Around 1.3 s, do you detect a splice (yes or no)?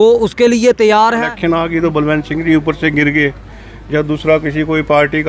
yes